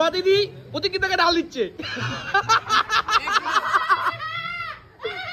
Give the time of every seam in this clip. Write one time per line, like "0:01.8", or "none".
none